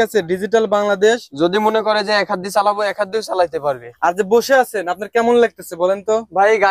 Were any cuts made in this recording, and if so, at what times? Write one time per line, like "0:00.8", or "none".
0:03.9